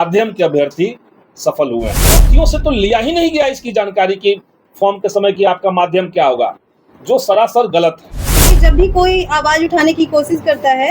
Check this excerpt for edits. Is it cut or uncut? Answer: cut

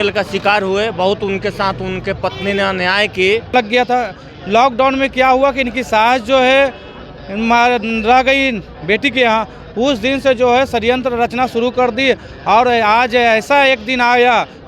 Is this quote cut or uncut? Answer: cut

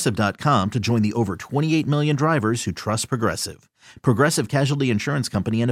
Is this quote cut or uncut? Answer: uncut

